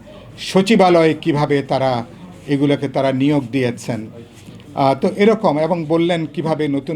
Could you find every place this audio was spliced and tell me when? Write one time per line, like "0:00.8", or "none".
none